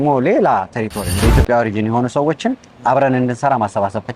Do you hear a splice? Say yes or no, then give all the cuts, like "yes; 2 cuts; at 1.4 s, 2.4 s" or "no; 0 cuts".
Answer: yes; 1 cut; at 1.1 s